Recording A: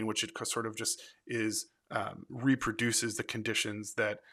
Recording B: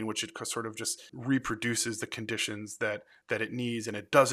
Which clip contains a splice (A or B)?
B